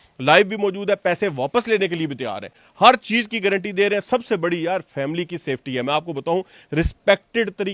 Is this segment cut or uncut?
uncut